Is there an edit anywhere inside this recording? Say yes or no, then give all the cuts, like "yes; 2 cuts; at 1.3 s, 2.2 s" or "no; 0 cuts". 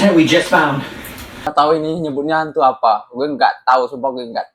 yes; 1 cut; at 1.5 s